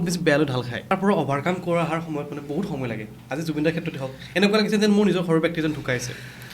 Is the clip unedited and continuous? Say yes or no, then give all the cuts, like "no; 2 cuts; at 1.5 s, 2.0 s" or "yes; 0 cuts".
no; 1 cut; at 0.9 s